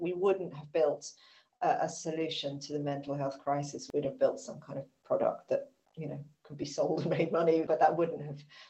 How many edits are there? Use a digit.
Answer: 2